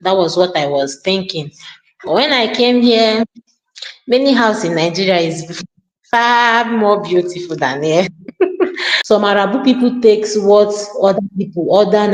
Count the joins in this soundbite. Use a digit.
1